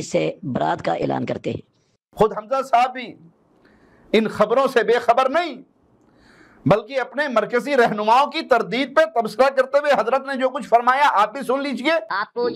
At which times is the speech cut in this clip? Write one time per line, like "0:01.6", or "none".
none